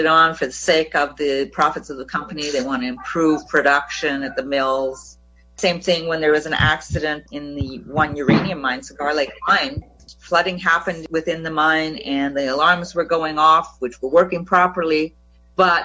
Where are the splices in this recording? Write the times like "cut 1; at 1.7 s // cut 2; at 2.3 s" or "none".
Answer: cut 1; at 9.8 s // cut 2; at 11.0 s